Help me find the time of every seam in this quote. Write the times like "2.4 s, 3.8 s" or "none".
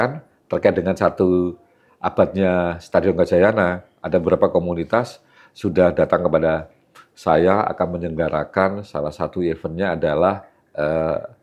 none